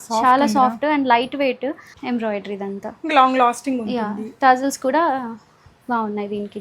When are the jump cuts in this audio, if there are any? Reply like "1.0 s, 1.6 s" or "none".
1.9 s